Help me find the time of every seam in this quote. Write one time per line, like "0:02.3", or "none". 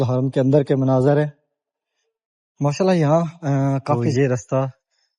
0:04.1